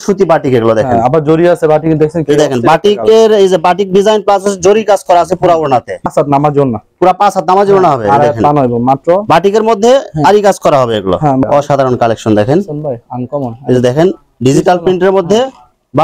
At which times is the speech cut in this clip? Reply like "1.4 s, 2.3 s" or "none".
6.1 s, 11.4 s